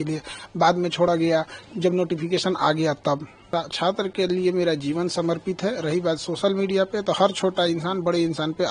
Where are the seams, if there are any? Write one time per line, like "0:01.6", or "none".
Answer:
0:03.5